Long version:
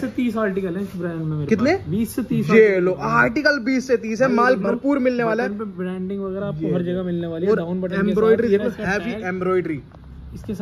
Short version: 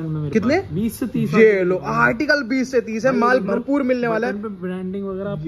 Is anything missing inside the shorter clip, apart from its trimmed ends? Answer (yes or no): no